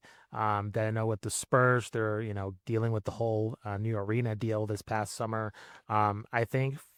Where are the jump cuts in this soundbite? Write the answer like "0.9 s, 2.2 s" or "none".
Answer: none